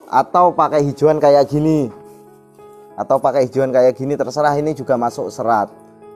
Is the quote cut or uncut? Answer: uncut